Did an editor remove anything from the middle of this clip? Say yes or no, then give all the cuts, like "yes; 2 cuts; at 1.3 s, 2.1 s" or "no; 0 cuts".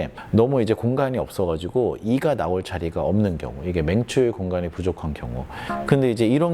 yes; 1 cut; at 5.6 s